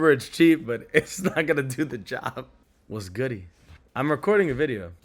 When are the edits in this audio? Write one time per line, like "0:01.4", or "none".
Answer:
0:02.4